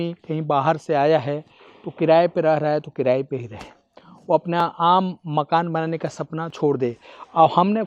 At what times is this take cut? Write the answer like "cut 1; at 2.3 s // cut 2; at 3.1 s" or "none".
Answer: none